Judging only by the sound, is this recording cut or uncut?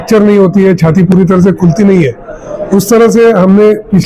uncut